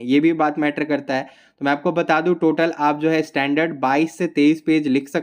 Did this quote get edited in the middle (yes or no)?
no